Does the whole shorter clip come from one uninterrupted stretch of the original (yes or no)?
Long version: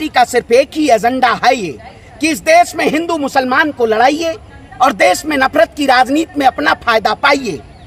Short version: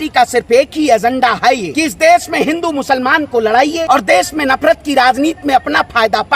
no